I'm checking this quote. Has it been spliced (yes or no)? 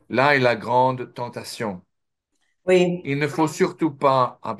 no